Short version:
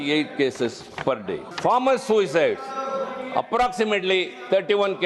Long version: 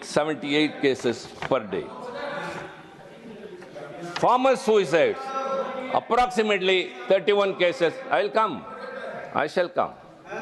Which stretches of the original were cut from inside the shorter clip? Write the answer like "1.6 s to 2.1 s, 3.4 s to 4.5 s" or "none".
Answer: 1.9 s to 4.1 s